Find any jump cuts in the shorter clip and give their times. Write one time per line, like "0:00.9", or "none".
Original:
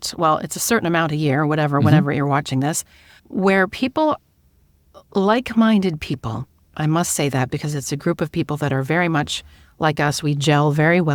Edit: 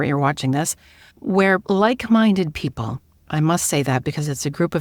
0:01.6